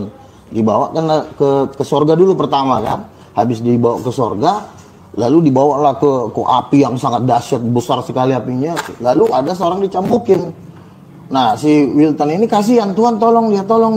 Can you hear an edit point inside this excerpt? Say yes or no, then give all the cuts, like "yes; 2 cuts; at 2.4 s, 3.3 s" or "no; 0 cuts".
no; 0 cuts